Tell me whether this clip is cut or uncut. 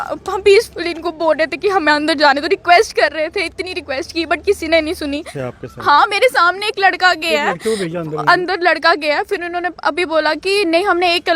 cut